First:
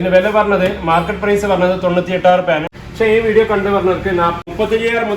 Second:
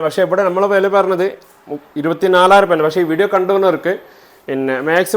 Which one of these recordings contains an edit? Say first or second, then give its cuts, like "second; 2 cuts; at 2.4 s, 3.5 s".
first; 2 cuts; at 2.7 s, 4.4 s